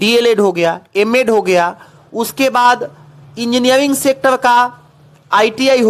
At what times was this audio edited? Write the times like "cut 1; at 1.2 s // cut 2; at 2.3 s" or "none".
none